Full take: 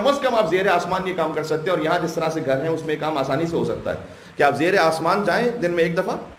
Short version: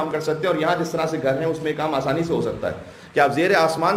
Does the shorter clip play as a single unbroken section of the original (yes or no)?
yes